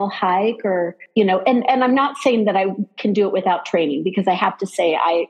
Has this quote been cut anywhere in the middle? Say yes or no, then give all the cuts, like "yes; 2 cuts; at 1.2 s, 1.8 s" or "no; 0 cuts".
yes; 1 cut; at 1.0 s